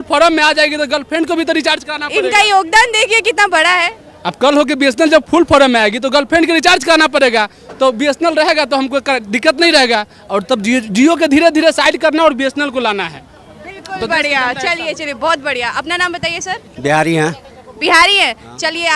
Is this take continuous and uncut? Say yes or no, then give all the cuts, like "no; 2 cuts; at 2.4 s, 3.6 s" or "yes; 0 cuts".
yes; 0 cuts